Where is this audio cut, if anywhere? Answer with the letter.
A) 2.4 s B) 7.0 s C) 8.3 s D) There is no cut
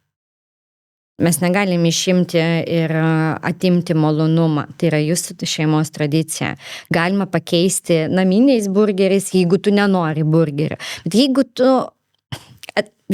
D